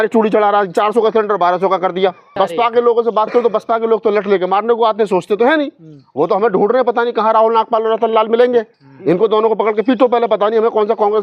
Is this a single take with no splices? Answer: no; 1 cut; at 2.4 s

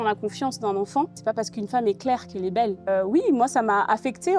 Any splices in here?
yes; 2 cuts; at 1.1 s, 2.9 s

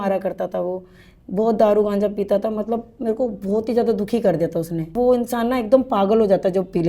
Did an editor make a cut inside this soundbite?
yes; 1 cut; at 4.9 s

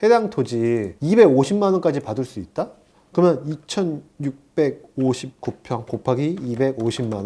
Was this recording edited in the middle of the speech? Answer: yes; 1 cut; at 0.9 s

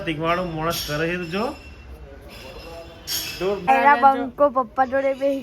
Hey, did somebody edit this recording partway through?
yes; 1 cut; at 3.6 s

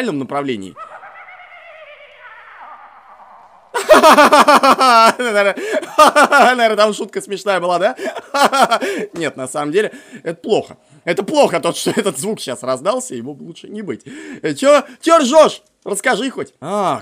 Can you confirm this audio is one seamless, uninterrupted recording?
yes; 0 cuts

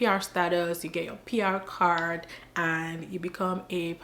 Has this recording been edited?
no; 0 cuts

